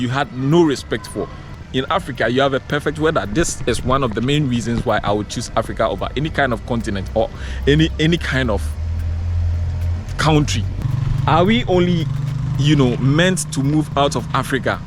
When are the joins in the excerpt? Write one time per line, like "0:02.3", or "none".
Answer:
0:01.6
0:10.8